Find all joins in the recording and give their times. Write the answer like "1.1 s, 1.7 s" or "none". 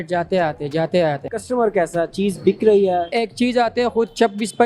1.4 s, 3.1 s